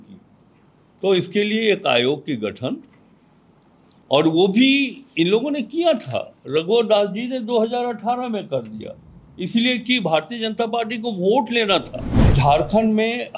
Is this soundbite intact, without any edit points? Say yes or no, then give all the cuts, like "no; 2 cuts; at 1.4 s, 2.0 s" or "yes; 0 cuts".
no; 1 cut; at 12.3 s